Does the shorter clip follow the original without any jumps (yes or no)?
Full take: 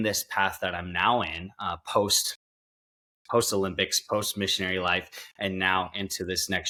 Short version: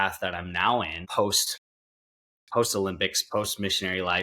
no